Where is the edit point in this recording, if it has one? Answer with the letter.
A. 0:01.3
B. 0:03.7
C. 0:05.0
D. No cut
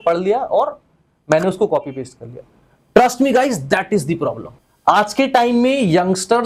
D